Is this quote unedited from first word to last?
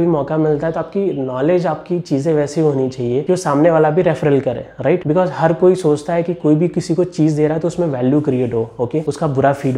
yes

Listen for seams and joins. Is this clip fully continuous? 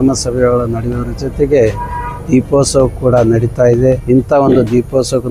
no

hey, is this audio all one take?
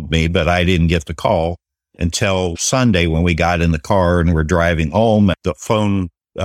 yes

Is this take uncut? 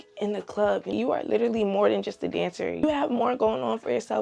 no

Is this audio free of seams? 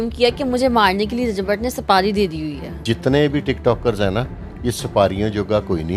no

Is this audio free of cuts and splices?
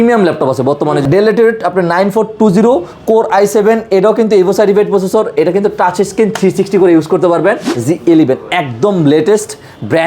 no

